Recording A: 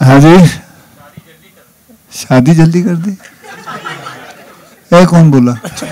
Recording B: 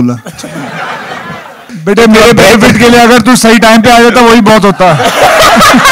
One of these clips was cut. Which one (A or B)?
B